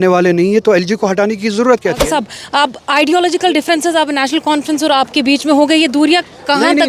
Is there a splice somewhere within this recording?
yes; 1 cut; at 2.0 s

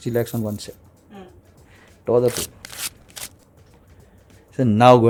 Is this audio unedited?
yes; 0 cuts

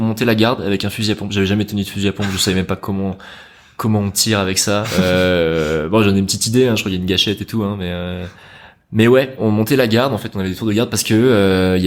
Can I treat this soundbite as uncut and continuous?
yes; 0 cuts

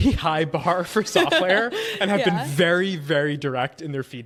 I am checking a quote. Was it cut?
no; 0 cuts

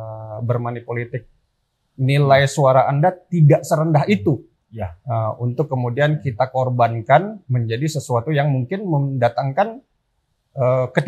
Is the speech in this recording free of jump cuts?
yes; 0 cuts

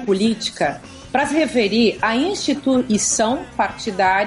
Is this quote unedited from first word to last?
yes; 0 cuts

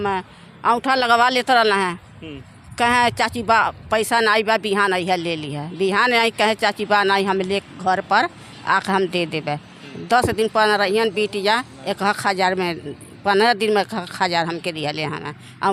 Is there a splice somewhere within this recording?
no; 0 cuts

